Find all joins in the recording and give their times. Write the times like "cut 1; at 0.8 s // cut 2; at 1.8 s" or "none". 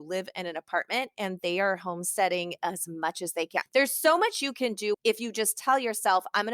cut 1; at 3.6 s // cut 2; at 5.0 s